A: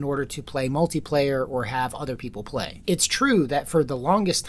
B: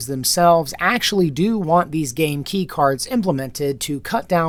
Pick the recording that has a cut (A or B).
A